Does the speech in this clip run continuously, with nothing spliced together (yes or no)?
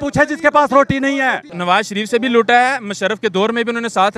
no